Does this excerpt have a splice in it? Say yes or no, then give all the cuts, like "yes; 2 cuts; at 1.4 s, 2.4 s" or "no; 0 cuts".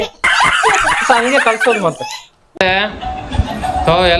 yes; 1 cut; at 2.4 s